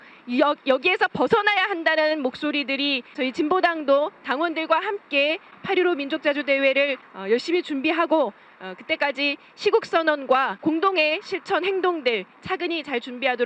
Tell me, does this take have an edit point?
yes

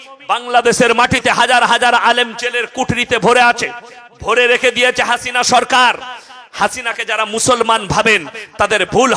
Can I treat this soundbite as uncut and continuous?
yes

